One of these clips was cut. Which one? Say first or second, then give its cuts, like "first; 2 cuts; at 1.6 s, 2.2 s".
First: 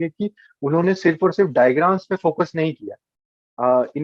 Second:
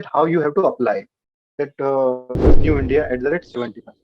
second; 1 cut; at 2.5 s